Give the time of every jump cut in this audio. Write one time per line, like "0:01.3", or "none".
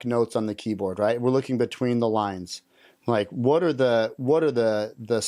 none